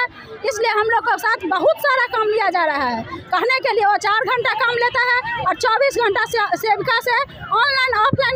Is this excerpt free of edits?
yes; 0 cuts

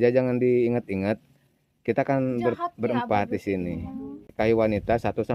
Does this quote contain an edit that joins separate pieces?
yes; 1 cut; at 4.3 s

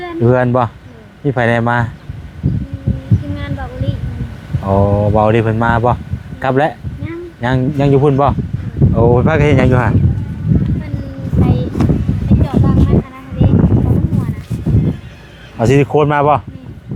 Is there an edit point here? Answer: no; 0 cuts

